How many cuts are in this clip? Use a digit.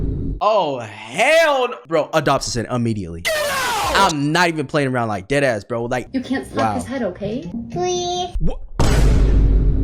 2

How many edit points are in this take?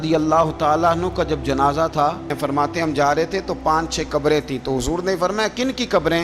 1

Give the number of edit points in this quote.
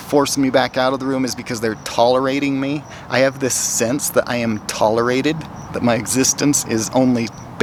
0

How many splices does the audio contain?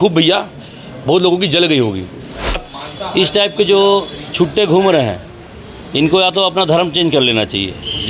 1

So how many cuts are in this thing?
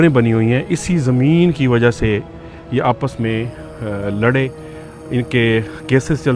0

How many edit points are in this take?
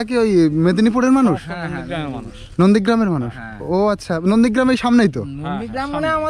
0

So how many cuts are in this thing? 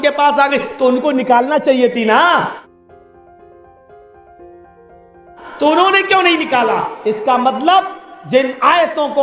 2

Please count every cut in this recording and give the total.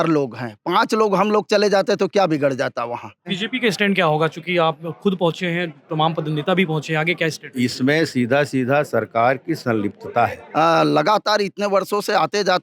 2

